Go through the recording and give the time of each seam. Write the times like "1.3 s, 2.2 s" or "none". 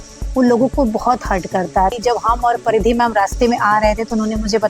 1.9 s